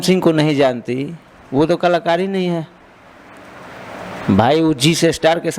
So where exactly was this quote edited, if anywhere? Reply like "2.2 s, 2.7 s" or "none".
none